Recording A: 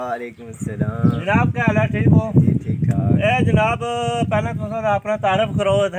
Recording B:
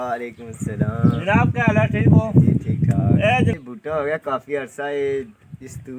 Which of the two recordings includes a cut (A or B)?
B